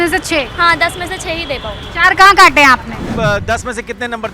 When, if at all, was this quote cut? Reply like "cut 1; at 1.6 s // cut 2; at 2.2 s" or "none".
cut 1; at 3.1 s